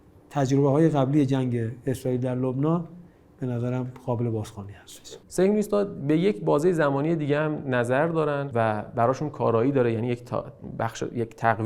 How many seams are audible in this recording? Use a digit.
2